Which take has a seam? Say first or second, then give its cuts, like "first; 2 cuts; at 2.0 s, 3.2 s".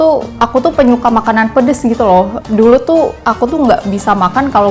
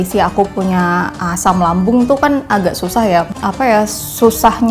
second; 1 cut; at 3.3 s